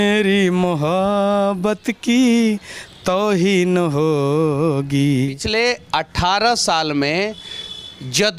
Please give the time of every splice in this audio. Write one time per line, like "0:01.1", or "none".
0:05.4

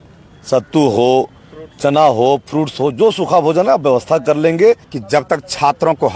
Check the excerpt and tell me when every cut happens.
0:04.9

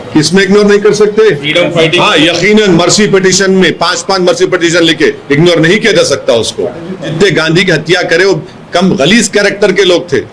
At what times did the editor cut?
0:07.1

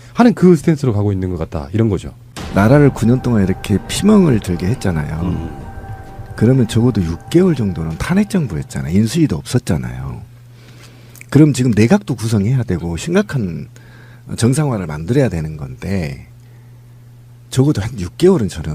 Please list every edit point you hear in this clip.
0:02.1

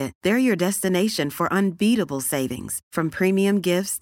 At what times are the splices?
none

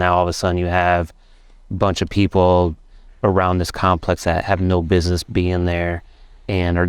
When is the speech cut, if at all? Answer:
none

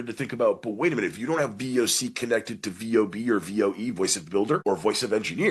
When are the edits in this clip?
0:04.6

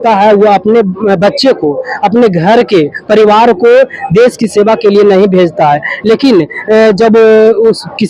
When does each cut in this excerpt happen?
none

